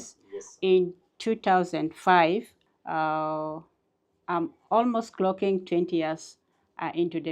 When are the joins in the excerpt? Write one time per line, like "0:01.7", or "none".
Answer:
0:02.5